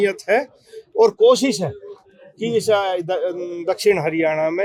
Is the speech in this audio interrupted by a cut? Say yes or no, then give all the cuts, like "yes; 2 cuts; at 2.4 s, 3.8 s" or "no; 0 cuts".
no; 0 cuts